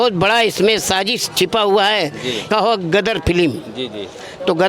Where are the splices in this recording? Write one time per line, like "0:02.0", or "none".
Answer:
0:02.4